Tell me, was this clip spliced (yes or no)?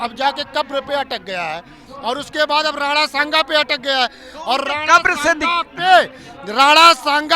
no